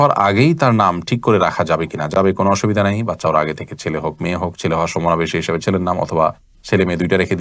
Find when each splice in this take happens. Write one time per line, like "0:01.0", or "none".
none